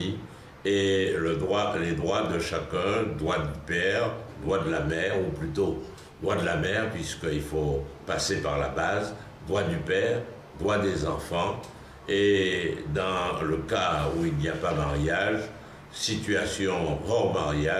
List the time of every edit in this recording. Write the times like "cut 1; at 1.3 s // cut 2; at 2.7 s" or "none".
cut 1; at 13.4 s